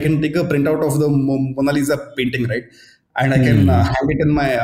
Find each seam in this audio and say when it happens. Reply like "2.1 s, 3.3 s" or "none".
none